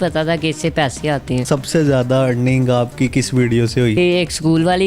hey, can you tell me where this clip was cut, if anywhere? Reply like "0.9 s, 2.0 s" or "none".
1.4 s, 3.9 s